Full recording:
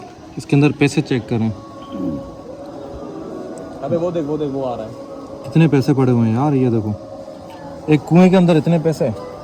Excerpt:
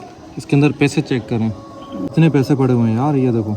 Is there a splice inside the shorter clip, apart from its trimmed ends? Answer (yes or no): yes